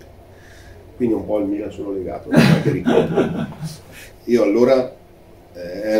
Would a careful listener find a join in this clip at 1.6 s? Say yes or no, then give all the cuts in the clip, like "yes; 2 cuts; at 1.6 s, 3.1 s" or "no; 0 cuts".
no; 1 cut; at 4.0 s